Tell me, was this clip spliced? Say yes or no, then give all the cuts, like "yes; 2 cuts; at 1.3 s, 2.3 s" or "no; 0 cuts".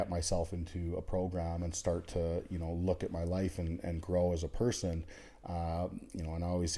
no; 0 cuts